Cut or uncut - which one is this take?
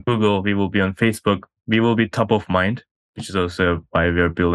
cut